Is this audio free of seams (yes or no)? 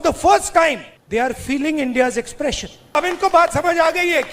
no